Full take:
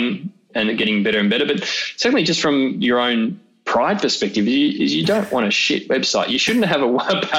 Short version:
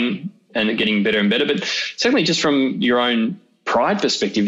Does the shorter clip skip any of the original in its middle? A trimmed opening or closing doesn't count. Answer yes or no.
no